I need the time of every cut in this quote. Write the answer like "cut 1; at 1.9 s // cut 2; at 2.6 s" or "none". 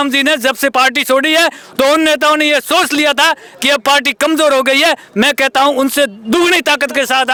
none

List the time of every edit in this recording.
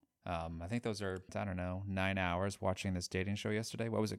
cut 1; at 1.3 s

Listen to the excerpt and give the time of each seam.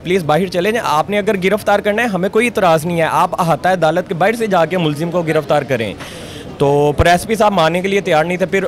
none

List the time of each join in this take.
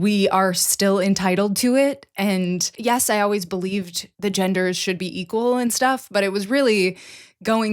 cut 1; at 2.7 s // cut 2; at 4.0 s

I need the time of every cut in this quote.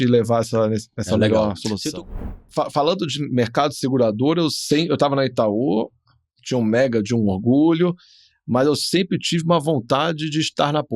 cut 1; at 2.0 s

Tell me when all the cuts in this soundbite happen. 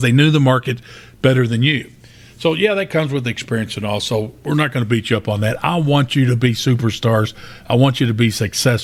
none

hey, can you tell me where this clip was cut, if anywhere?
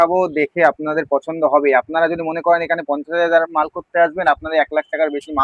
none

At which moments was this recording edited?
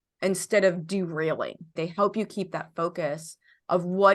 cut 1; at 1.8 s

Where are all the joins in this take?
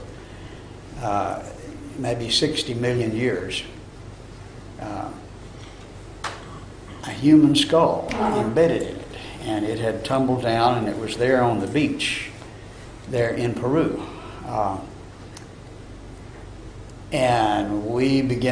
none

